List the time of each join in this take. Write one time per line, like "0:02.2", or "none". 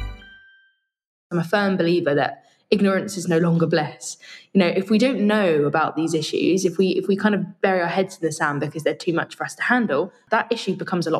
0:01.2
0:10.2